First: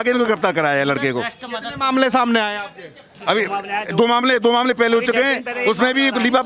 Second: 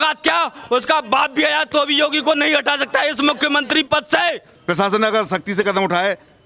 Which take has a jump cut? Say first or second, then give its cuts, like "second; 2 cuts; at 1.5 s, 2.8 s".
second; 1 cut; at 4.5 s